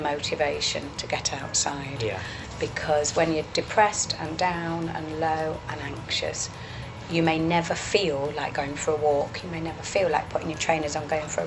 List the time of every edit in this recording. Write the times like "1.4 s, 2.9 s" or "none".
none